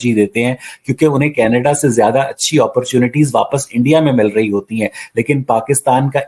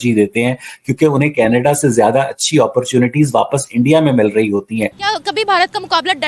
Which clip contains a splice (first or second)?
second